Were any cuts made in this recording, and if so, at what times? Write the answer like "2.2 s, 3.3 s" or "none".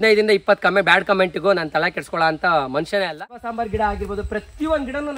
3.5 s

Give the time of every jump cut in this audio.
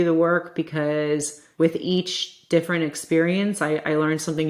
1.4 s

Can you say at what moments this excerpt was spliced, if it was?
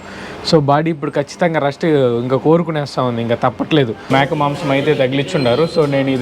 4.0 s

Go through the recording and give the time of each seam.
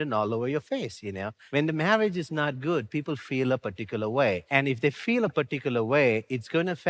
1.4 s

